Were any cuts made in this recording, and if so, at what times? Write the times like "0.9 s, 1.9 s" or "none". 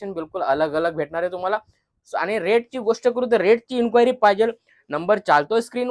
none